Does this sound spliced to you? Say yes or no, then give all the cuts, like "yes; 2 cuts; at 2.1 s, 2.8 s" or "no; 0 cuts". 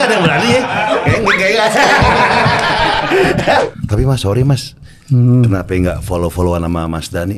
yes; 1 cut; at 3.6 s